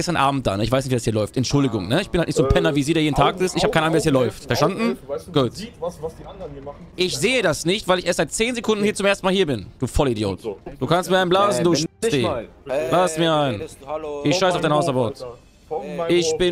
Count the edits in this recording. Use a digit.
3